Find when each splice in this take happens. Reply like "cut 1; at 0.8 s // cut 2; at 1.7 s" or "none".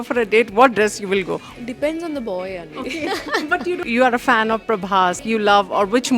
cut 1; at 1.4 s // cut 2; at 3.8 s // cut 3; at 5.2 s